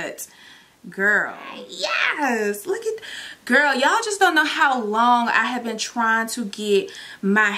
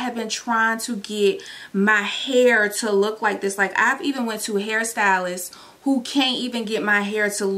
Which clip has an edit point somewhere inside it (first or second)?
first